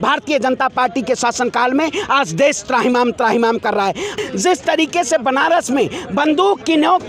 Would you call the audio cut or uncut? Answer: cut